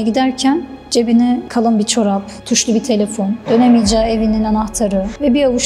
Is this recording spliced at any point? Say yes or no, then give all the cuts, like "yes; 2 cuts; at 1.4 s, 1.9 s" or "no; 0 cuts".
yes; 1 cut; at 1.5 s